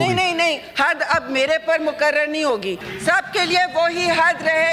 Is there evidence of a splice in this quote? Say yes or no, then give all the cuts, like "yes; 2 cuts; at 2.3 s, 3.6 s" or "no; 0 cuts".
yes; 1 cut; at 2.9 s